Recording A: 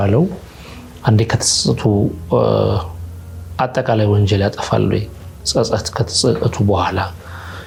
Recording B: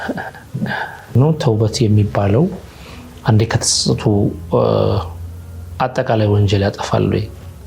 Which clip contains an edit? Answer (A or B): B